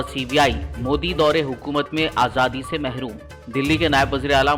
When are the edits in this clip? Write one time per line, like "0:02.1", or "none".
none